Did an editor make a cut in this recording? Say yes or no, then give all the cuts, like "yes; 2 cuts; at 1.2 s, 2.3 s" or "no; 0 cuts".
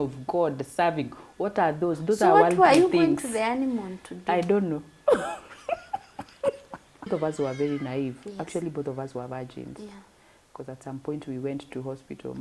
yes; 1 cut; at 7.1 s